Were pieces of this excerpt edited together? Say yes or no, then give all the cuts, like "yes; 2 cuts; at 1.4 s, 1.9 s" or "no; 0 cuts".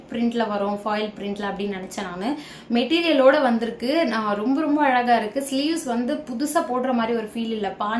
no; 0 cuts